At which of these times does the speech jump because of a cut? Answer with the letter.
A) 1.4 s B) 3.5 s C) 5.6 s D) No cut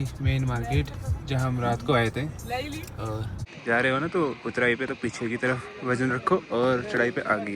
B